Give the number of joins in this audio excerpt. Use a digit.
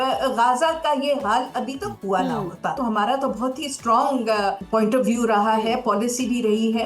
2